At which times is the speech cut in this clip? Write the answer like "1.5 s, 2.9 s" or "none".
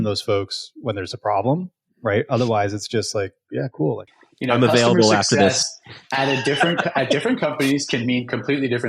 4.2 s